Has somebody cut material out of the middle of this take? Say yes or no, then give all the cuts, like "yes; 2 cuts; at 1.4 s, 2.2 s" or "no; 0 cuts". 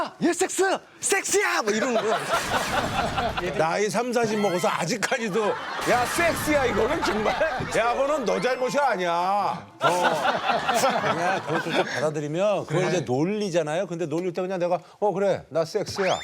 yes; 1 cut; at 3.4 s